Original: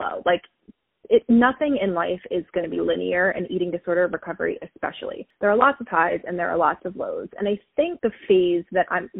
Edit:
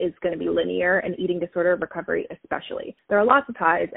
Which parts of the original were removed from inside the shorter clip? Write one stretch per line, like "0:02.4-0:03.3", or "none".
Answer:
none